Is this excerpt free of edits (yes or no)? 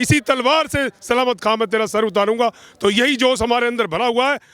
yes